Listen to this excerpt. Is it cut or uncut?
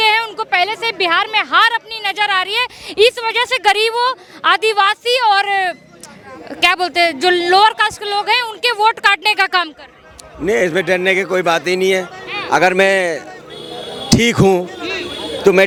uncut